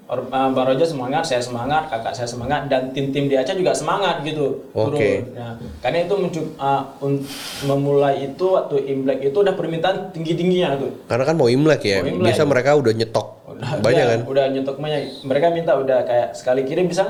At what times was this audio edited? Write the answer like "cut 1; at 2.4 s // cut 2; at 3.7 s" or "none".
none